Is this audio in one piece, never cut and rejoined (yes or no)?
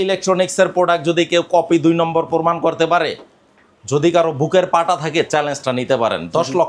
yes